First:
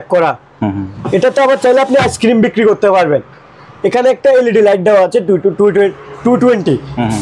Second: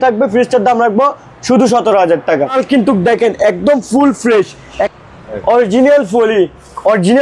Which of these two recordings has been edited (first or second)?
second